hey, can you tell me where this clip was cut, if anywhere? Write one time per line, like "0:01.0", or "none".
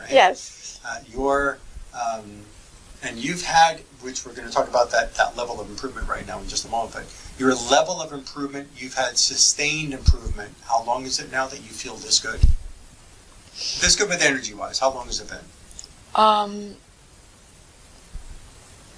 none